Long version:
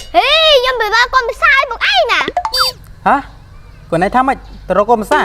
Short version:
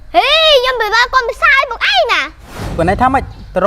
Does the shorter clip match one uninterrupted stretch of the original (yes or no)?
no